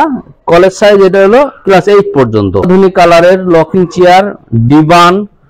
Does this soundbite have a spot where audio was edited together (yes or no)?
yes